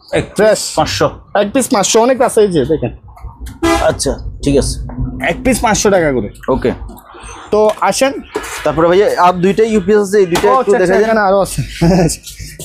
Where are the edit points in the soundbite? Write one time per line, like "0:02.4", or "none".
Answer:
none